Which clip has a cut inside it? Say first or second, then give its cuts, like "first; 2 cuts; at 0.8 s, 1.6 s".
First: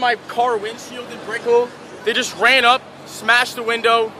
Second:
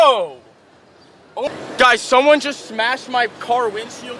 second; 1 cut; at 1.5 s